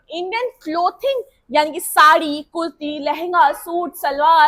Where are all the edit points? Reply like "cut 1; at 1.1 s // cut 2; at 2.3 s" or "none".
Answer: none